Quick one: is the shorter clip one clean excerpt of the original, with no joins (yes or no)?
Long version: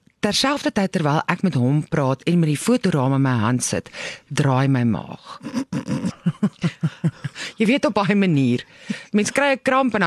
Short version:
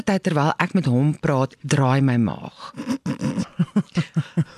no